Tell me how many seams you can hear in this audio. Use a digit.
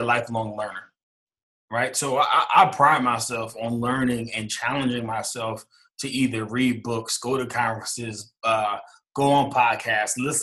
0